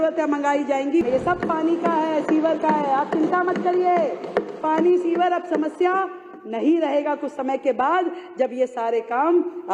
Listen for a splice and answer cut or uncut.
cut